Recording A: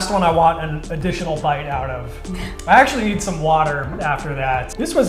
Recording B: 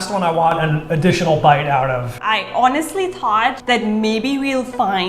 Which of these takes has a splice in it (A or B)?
B